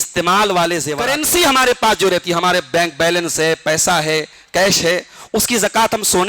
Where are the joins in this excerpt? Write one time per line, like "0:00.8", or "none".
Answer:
0:01.0